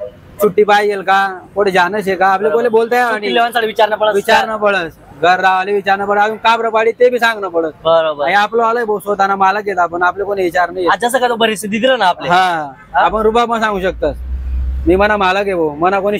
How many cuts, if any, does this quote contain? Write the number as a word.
zero